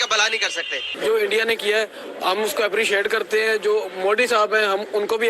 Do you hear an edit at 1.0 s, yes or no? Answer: yes